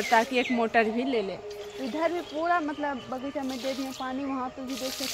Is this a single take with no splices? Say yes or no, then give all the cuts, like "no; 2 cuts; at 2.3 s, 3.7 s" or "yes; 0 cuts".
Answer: yes; 0 cuts